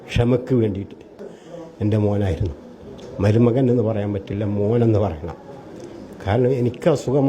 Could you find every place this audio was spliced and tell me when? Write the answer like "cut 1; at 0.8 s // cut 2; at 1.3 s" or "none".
cut 1; at 1.2 s